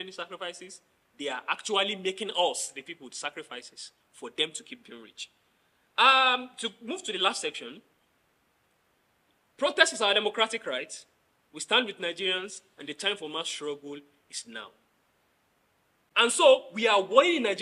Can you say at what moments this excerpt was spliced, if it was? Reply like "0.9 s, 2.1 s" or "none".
16.2 s

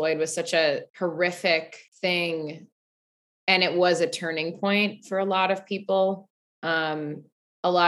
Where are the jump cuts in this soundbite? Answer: 0.9 s, 1.8 s

